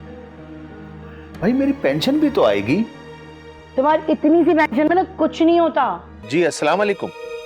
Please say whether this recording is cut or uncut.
cut